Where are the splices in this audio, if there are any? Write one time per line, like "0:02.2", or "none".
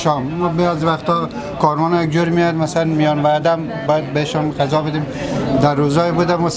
none